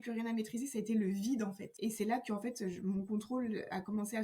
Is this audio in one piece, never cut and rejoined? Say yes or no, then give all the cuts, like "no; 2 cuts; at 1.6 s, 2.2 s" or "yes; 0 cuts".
no; 1 cut; at 1.7 s